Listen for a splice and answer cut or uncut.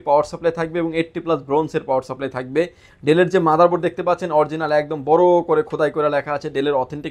uncut